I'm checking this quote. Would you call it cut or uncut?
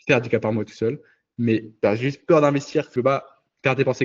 cut